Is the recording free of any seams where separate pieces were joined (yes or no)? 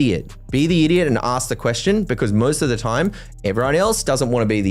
yes